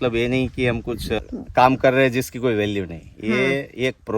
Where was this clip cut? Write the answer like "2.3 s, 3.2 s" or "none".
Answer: 1.2 s